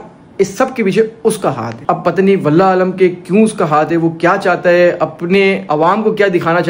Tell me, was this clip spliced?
no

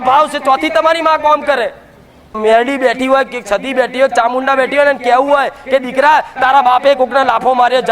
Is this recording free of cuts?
no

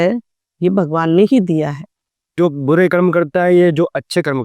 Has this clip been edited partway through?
yes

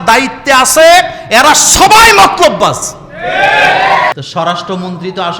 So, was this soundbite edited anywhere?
yes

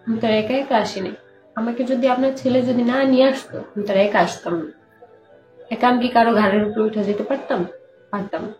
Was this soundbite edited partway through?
no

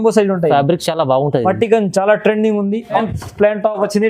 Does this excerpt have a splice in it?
yes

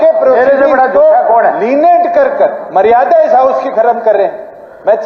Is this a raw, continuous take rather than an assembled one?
yes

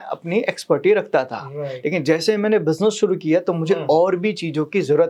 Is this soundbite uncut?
yes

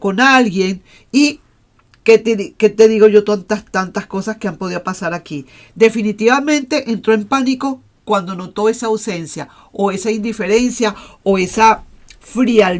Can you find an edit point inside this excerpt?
no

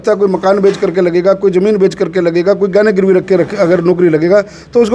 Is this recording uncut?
yes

